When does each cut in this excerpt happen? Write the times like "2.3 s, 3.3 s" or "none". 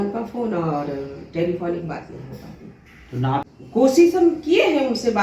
3.5 s